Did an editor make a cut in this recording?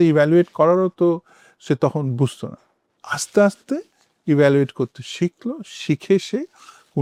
no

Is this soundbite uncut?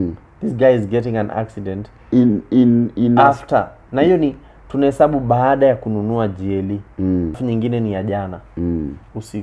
no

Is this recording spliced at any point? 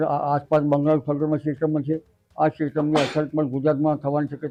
no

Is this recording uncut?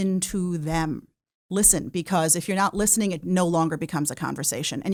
yes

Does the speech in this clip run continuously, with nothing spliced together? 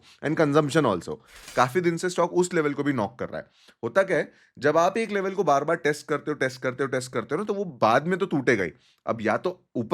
no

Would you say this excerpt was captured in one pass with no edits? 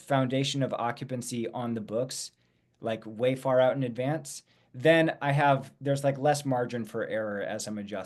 yes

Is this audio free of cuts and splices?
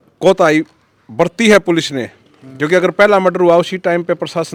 yes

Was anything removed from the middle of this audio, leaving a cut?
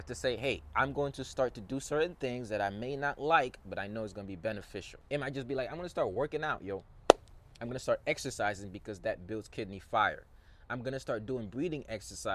yes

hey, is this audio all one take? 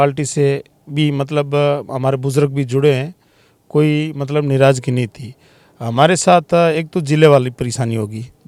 yes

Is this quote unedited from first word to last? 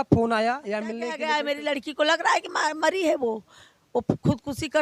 no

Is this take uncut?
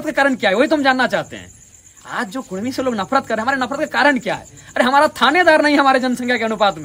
yes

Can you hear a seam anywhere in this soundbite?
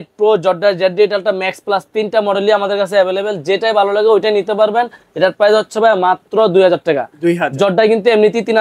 no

